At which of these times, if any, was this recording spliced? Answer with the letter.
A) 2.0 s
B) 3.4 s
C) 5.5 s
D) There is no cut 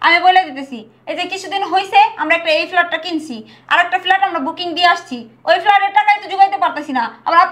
D